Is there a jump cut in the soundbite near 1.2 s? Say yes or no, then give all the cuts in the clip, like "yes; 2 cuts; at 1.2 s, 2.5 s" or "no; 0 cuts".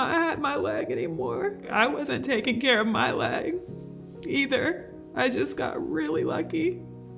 no; 0 cuts